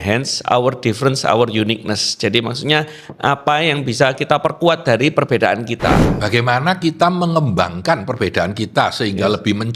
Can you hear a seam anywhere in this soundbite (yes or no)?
no